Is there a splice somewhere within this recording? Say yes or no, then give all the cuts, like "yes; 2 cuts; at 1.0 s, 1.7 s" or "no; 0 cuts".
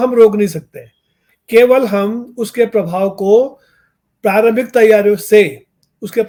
no; 0 cuts